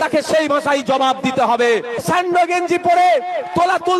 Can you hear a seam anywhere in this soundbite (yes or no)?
yes